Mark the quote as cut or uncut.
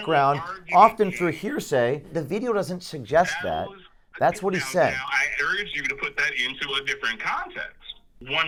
uncut